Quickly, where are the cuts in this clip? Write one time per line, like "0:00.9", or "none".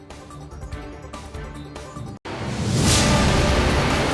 none